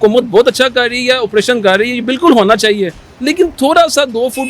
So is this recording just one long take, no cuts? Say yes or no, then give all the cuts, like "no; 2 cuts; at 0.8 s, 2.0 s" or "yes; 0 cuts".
yes; 0 cuts